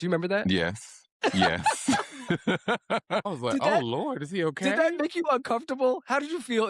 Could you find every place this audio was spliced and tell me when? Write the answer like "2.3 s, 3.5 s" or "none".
3.3 s